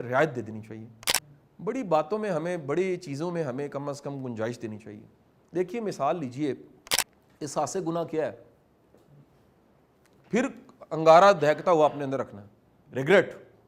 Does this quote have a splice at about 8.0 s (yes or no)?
no